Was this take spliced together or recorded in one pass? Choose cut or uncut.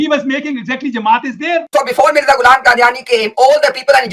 cut